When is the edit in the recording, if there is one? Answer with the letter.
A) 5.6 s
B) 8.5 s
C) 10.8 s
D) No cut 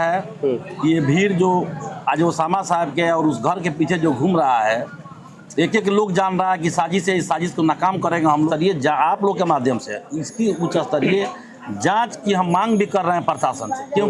B